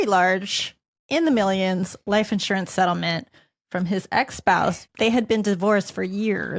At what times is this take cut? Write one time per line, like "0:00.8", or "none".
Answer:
0:04.8